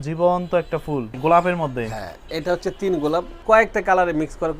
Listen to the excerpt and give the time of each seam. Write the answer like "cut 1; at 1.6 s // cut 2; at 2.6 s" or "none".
cut 1; at 1.1 s // cut 2; at 3.3 s